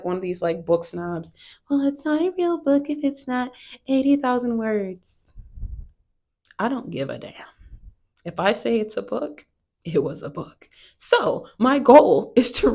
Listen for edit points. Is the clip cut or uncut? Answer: uncut